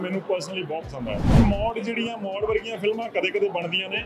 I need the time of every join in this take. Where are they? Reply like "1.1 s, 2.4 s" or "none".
1.4 s